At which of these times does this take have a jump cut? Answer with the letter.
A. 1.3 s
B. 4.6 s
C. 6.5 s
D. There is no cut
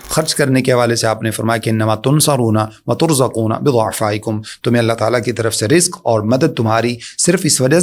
D